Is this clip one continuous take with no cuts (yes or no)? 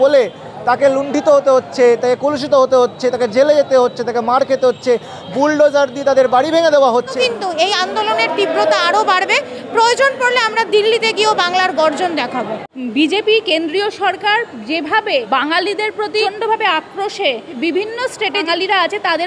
no